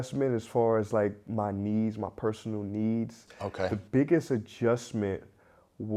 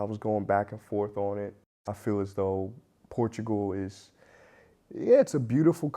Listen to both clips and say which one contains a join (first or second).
second